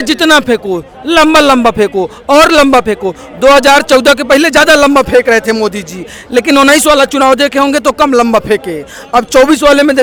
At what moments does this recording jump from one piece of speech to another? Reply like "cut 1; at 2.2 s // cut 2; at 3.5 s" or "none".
none